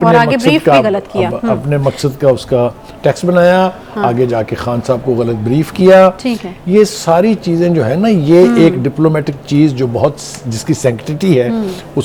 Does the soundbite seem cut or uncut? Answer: uncut